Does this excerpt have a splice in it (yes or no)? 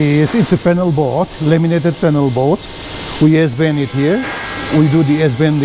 no